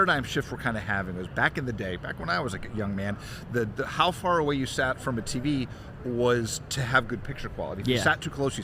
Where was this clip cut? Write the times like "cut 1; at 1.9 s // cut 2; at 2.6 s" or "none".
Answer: none

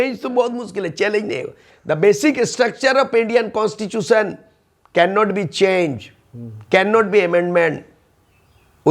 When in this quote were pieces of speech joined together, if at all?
cut 1; at 1.7 s

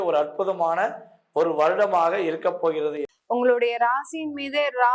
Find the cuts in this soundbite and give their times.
cut 1; at 3.1 s

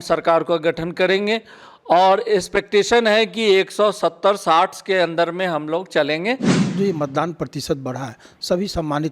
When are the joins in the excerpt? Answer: cut 1; at 6.5 s

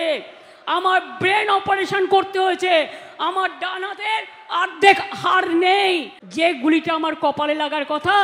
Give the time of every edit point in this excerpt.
cut 1; at 6.2 s

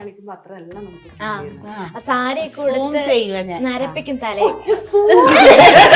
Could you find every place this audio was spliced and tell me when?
none

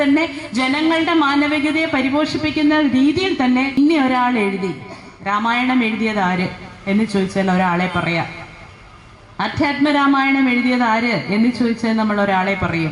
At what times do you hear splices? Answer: cut 1; at 3.8 s

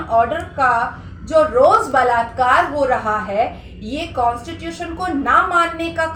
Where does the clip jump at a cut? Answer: none

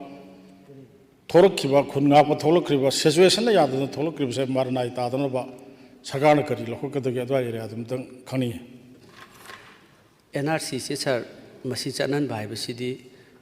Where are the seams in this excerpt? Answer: cut 1; at 9.0 s

